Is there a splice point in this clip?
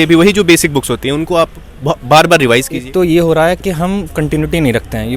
yes; 1 cut; at 2.8 s

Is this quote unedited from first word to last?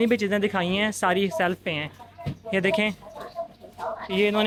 yes; 0 cuts

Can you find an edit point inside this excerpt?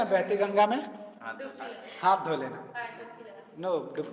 no; 0 cuts

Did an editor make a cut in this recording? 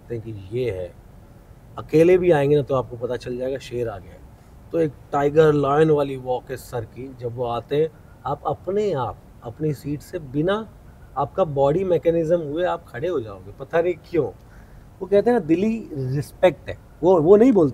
no; 0 cuts

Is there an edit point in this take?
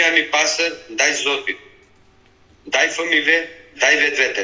no; 0 cuts

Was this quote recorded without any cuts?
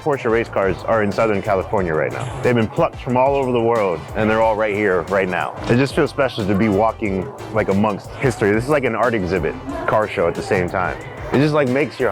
no; 6 cuts; at 2.3 s, 4.1 s, 5.5 s, 8.1 s, 9.7 s, 11.1 s

